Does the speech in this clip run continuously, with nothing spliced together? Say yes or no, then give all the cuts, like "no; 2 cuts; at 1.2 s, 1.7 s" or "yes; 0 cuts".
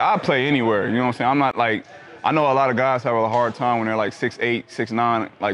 yes; 0 cuts